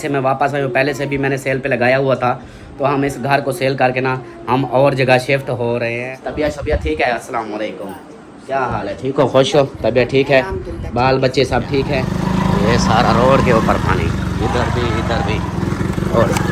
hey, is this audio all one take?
no; 2 cuts; at 5.9 s, 12.0 s

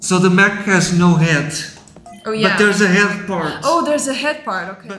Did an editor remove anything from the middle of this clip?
no; 0 cuts

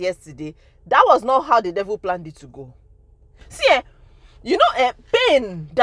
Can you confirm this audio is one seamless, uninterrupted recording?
no; 1 cut; at 3.4 s

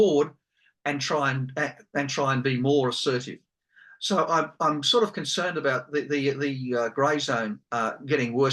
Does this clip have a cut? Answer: no; 0 cuts

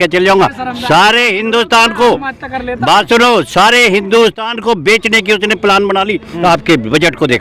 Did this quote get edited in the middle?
no; 0 cuts

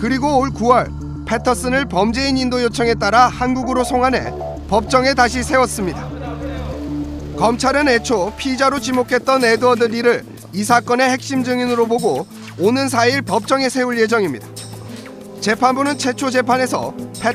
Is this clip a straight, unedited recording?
no; 1 cut; at 15.7 s

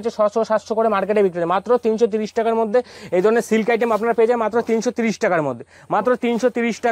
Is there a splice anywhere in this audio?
no; 0 cuts

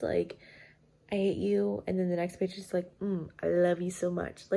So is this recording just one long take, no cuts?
yes; 0 cuts

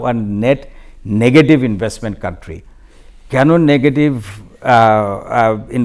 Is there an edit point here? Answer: no; 0 cuts

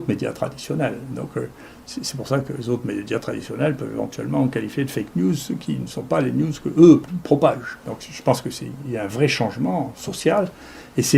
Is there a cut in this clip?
no; 0 cuts

